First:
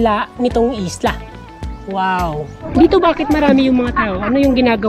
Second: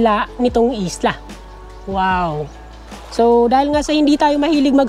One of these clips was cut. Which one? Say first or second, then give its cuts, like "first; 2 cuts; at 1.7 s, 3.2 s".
first; 1 cut; at 2.6 s